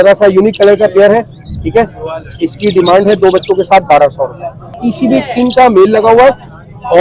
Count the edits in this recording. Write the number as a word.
one